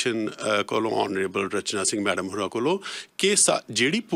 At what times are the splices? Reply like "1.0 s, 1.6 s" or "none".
none